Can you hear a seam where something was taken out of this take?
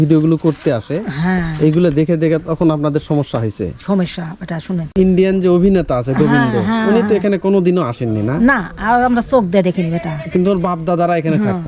yes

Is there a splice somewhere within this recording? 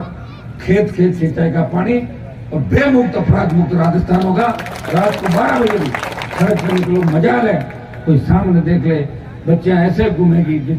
no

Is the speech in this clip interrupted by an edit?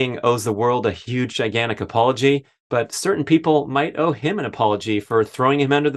no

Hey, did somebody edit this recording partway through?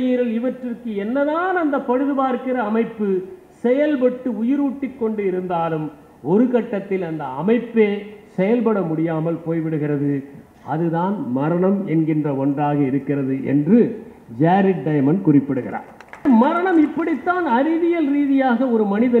yes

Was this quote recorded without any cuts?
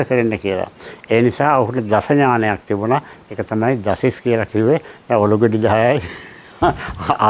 yes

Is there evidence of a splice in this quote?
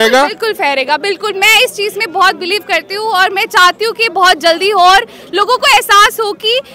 no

